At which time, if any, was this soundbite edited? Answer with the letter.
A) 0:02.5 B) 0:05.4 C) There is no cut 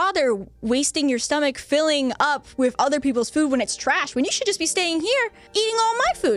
B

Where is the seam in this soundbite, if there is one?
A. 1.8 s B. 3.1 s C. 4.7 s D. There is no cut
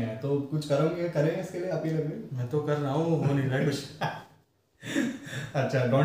D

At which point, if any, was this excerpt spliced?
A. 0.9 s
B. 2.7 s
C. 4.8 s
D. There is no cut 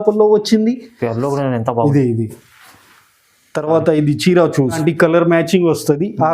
C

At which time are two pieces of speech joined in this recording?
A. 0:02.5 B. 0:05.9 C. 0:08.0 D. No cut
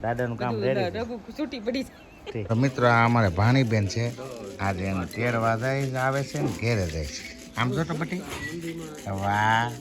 A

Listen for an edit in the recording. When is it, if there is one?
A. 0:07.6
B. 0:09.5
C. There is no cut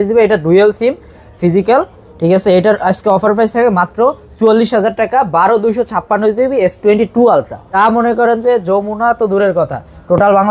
A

